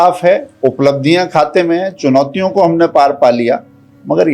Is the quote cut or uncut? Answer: uncut